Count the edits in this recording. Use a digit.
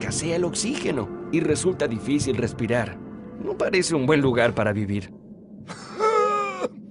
1